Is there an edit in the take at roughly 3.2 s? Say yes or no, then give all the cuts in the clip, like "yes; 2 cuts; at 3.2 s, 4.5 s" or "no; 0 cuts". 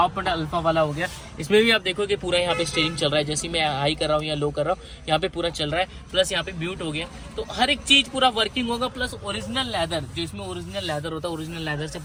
no; 0 cuts